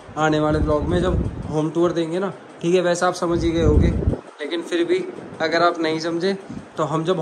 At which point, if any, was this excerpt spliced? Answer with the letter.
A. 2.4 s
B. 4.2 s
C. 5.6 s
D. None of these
D